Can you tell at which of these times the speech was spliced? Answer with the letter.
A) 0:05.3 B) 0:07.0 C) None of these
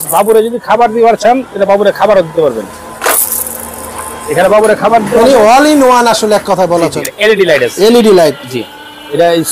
B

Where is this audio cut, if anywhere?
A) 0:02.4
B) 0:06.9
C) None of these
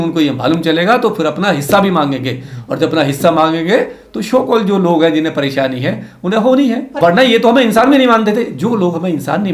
B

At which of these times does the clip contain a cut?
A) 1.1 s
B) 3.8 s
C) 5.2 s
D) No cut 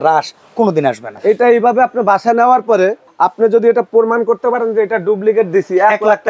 A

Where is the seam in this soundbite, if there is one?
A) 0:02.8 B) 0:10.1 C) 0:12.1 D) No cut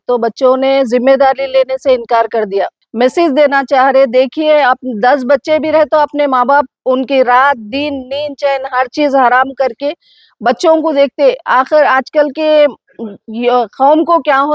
A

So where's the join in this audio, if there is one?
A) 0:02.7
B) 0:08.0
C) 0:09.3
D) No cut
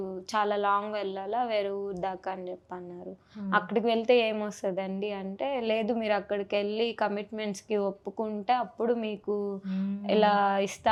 D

